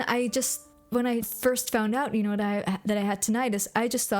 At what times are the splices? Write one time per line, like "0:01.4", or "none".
0:01.3